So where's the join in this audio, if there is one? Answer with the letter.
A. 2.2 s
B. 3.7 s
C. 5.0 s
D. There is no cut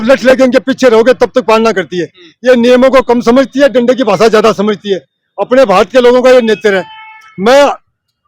D